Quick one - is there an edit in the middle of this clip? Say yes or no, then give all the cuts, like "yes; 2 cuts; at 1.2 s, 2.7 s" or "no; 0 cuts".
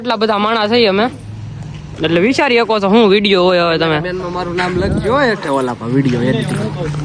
no; 0 cuts